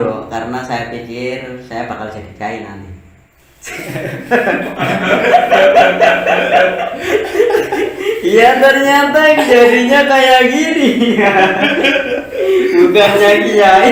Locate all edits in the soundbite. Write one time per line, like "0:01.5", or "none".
none